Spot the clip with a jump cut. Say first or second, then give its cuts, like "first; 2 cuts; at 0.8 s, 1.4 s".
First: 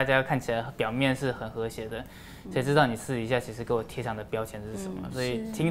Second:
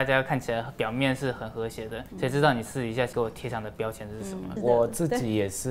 second; 3 cuts; at 2.0 s, 3.1 s, 4.5 s